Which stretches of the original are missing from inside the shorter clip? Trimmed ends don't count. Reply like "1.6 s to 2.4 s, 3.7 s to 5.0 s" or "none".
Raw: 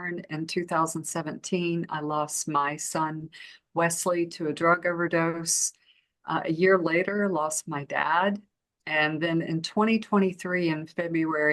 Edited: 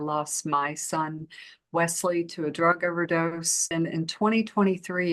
5.7 s to 9.3 s